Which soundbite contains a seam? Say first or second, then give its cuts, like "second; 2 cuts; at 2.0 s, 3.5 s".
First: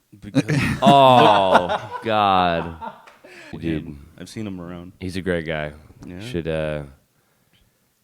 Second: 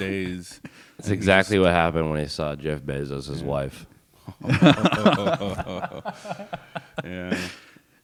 first; 1 cut; at 3.5 s